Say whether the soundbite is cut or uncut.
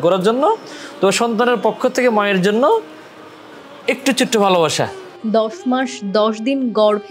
cut